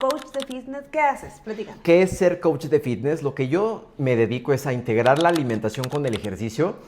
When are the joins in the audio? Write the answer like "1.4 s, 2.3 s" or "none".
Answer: 1.8 s